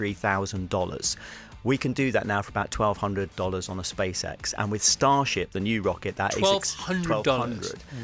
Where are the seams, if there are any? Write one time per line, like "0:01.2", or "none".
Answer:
none

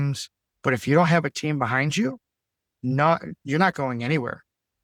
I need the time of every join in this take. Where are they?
none

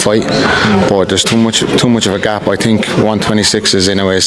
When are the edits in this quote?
none

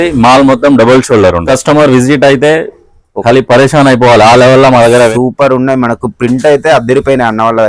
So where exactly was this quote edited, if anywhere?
0:01.4
0:05.1

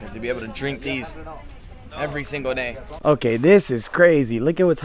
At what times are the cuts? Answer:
0:02.9

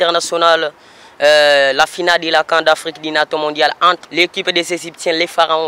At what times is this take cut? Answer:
0:04.0

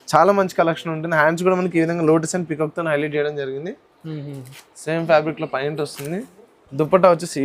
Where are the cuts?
none

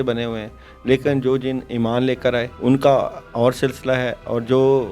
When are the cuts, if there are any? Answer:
0:02.5

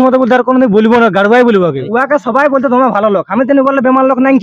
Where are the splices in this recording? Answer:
0:01.8

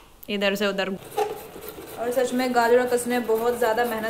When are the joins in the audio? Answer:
0:01.0

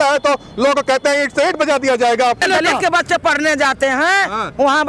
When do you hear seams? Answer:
0:02.4

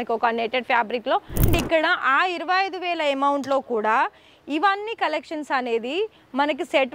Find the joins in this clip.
0:01.5

